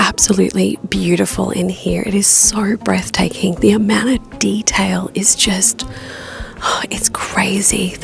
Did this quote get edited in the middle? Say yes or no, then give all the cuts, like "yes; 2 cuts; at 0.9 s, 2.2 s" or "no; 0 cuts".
no; 0 cuts